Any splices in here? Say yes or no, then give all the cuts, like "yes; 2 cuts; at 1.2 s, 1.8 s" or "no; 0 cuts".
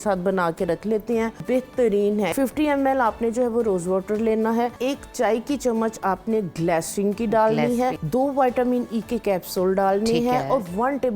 yes; 4 cuts; at 1.4 s, 2.3 s, 4.8 s, 8.0 s